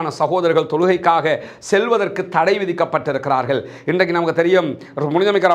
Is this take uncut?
yes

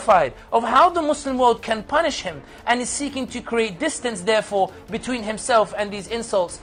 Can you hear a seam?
no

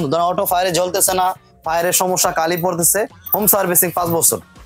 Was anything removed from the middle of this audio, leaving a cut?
no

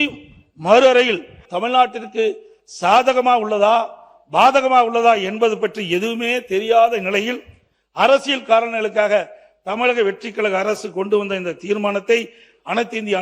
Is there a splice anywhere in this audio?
yes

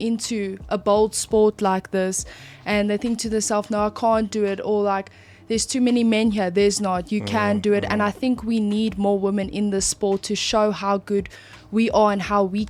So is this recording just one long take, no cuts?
yes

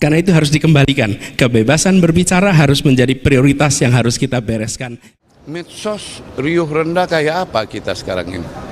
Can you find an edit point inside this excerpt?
yes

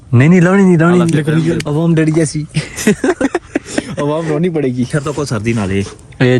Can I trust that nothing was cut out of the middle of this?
no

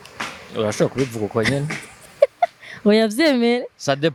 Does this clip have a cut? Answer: no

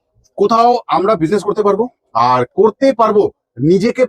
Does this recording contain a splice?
no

